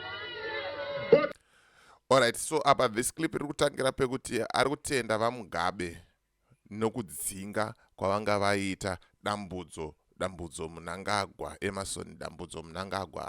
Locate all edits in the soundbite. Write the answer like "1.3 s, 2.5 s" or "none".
1.3 s